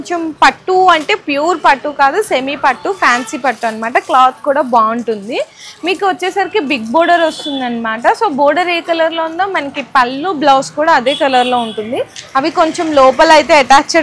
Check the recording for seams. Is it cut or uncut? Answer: uncut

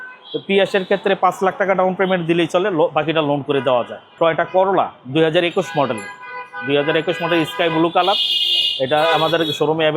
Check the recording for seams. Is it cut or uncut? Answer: uncut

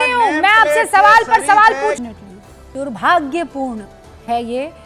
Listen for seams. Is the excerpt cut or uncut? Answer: cut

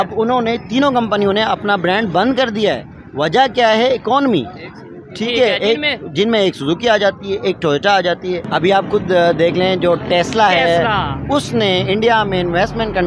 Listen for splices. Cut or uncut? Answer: cut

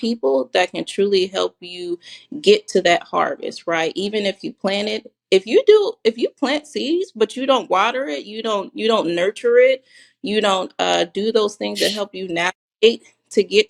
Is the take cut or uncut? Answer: uncut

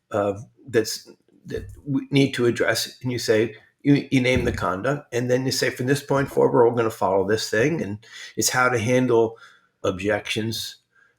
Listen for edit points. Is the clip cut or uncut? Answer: cut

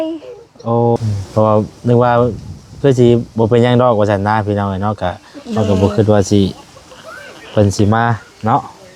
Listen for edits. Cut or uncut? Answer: cut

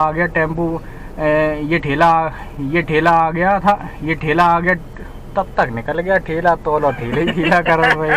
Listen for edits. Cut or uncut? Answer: uncut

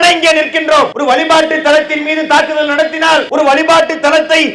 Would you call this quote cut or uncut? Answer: cut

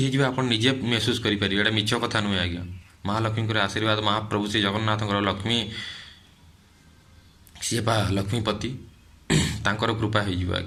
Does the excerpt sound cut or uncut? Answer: uncut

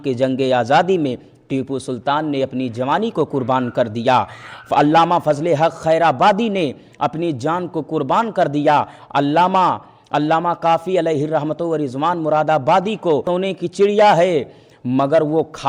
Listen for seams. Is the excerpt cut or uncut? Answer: cut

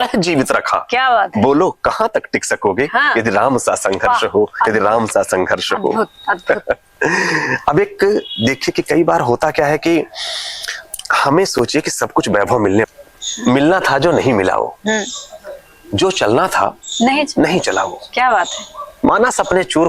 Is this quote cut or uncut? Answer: cut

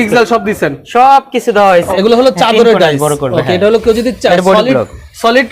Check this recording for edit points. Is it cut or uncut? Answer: cut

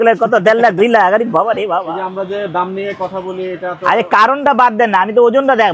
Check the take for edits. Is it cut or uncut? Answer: cut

